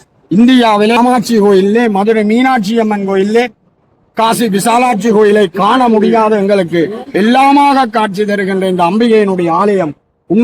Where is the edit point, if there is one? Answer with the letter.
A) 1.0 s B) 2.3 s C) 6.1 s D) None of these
A